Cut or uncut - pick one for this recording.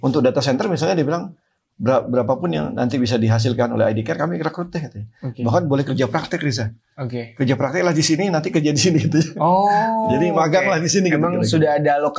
uncut